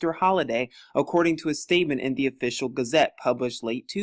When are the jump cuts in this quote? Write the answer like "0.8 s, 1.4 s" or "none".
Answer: 2.4 s